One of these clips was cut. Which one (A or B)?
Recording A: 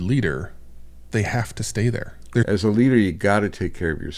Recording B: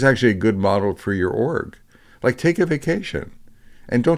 A